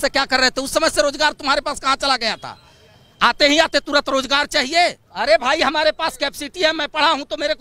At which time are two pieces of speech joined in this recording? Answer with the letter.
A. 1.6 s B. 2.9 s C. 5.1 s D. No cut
C